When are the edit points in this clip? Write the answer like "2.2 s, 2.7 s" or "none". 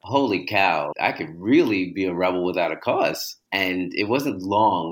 0.9 s, 3.3 s